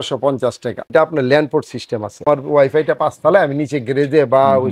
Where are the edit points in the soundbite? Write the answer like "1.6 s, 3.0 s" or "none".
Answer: 0.8 s, 2.2 s